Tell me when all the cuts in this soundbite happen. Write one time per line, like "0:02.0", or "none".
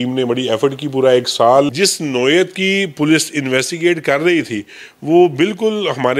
0:01.7